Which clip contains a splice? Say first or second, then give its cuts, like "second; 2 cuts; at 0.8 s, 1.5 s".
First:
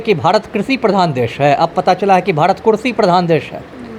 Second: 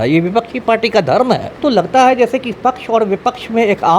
second; 1 cut; at 1.5 s